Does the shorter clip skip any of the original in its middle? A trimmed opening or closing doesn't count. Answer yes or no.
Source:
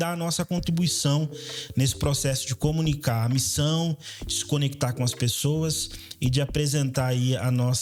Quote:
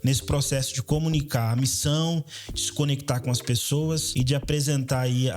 yes